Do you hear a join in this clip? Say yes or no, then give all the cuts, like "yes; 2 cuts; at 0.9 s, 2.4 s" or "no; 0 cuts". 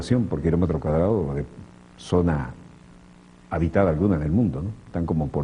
yes; 1 cut; at 2.9 s